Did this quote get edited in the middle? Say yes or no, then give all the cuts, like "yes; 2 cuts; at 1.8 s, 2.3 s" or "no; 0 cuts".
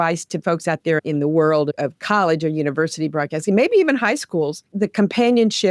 yes; 1 cut; at 4.6 s